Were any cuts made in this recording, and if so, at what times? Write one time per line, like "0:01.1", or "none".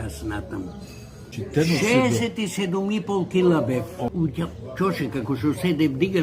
0:01.2
0:04.1